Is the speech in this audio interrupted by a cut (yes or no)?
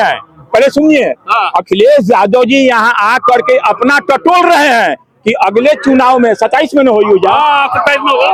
no